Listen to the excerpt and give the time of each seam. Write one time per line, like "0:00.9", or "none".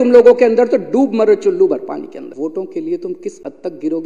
0:02.3

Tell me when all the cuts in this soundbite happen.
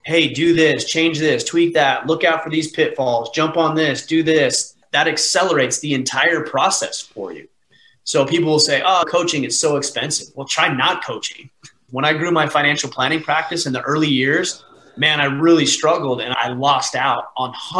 0:11.8
0:16.3

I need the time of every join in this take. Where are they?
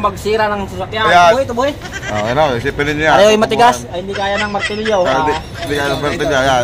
0:01.4

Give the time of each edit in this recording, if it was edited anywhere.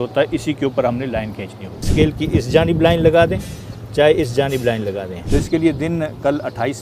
0:01.8
0:05.1

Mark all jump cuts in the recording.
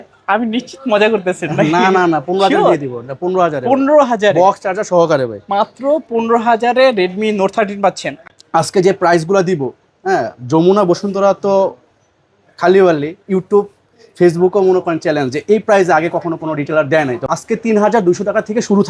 0:08.1
0:17.3

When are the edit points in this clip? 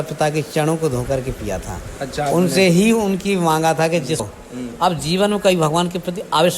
0:04.2

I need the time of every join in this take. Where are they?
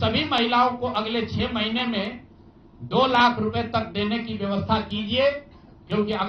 none

